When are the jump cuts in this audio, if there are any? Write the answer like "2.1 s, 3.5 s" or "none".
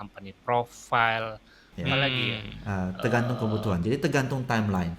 2.1 s